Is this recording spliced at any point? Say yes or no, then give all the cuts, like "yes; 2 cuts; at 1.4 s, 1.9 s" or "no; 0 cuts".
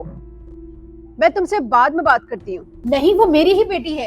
yes; 1 cut; at 2.7 s